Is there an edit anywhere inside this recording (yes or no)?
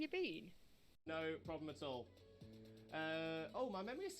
yes